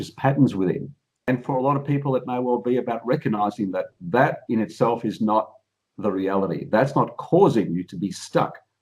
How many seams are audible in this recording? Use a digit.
1